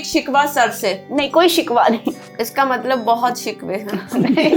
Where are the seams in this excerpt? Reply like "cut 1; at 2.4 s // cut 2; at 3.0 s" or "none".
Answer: cut 1; at 2.3 s